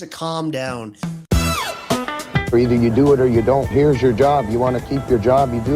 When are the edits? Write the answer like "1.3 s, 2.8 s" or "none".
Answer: 1.0 s